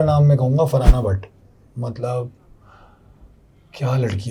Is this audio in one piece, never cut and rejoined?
yes; 0 cuts

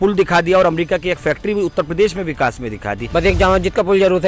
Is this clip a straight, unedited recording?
no; 1 cut; at 3.0 s

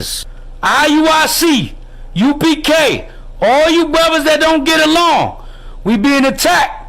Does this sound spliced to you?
yes; 1 cut; at 1.6 s

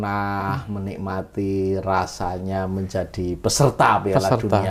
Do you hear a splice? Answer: no; 0 cuts

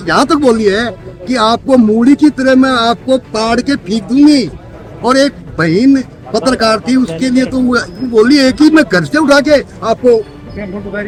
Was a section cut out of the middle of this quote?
no; 0 cuts

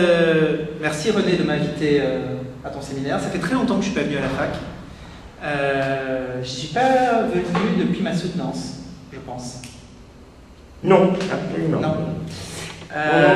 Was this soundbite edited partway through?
no; 0 cuts

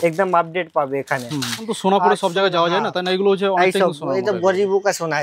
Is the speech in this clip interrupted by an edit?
yes; 1 cut; at 1.7 s

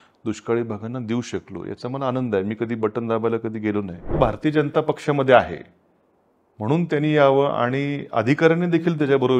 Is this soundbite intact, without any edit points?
no; 1 cut; at 4.2 s

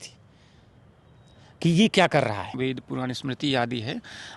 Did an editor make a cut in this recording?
yes; 1 cut; at 2.5 s

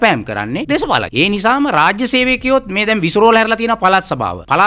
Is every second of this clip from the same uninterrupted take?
yes; 0 cuts

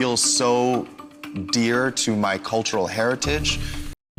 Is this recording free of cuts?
yes; 0 cuts

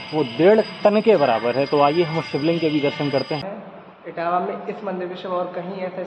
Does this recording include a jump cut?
yes; 1 cut; at 3.5 s

